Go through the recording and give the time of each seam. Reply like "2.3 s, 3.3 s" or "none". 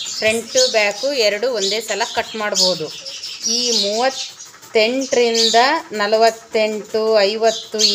none